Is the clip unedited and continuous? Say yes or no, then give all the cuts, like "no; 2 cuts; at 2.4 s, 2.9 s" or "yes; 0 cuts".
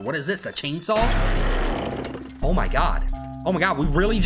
yes; 0 cuts